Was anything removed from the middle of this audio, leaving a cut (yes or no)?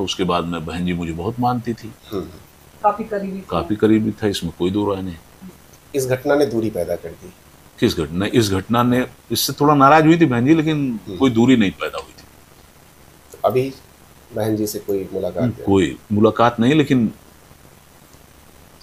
no